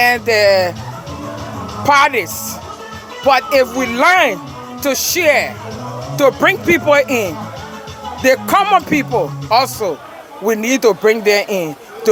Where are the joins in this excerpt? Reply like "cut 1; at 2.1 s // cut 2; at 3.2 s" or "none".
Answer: none